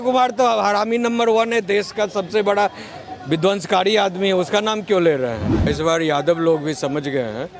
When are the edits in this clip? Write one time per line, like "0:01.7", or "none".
0:05.6